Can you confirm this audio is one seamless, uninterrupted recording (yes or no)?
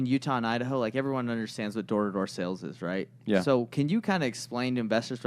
yes